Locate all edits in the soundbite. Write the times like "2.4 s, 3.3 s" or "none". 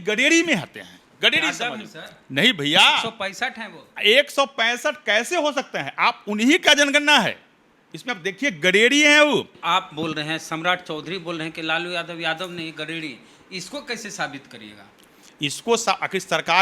9.5 s